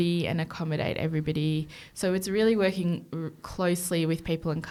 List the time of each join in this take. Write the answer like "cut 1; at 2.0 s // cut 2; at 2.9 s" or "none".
none